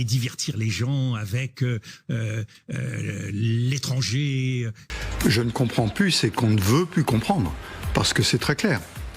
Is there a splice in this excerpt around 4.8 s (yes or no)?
yes